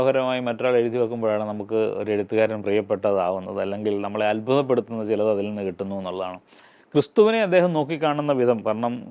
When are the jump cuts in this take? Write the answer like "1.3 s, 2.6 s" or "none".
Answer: none